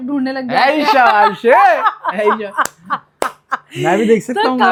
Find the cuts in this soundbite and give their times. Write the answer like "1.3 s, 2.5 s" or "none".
none